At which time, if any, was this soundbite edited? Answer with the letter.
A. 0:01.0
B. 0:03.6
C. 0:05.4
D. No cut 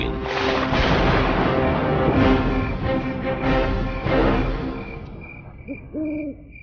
D